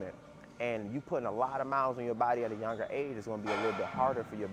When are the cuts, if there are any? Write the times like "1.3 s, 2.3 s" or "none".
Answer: none